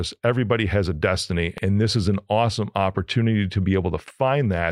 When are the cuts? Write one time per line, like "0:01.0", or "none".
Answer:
0:01.5

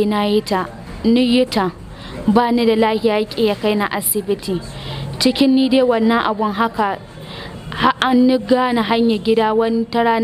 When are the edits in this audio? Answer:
none

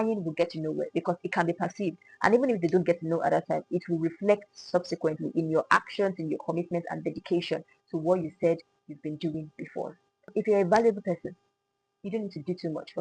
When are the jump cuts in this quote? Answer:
0:10.3

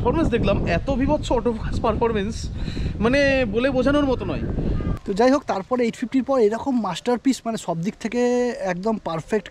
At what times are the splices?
0:04.9

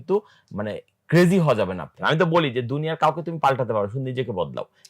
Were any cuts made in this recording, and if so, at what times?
0:01.9

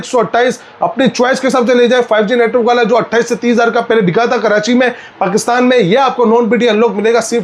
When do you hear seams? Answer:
none

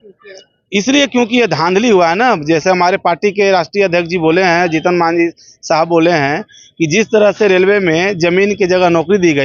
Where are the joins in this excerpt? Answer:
none

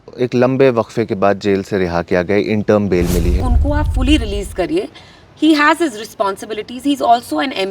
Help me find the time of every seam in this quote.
0:03.4

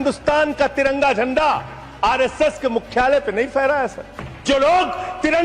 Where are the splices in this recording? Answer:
0:04.3

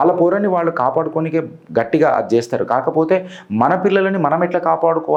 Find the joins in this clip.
none

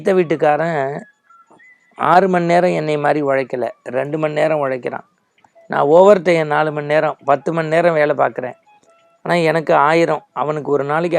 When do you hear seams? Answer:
none

